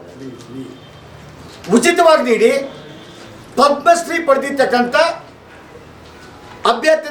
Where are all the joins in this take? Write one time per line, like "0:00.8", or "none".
none